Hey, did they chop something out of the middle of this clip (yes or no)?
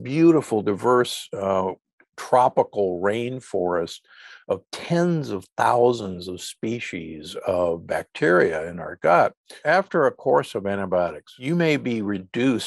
yes